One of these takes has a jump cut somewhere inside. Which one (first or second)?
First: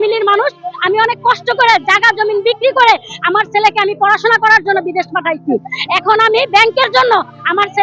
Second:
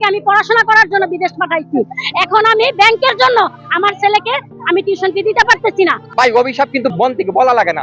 second